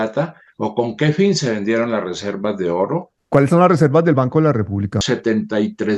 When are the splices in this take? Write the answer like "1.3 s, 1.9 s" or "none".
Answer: 3.1 s, 5.0 s